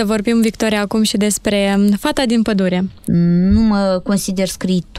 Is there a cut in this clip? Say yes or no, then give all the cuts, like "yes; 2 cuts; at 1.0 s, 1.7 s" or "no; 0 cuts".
yes; 1 cut; at 3.0 s